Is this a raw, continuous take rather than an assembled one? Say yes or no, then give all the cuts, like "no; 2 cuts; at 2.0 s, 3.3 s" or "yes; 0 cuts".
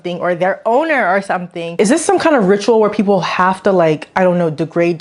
no; 1 cut; at 1.7 s